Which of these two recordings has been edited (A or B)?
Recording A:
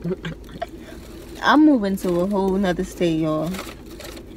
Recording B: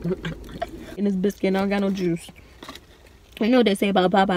B